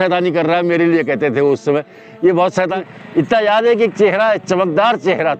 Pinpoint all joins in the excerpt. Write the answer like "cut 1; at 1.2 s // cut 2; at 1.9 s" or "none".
cut 1; at 2.8 s